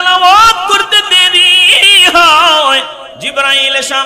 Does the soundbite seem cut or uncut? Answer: cut